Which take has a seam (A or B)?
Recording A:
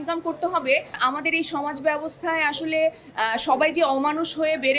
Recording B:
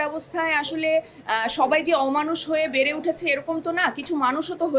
A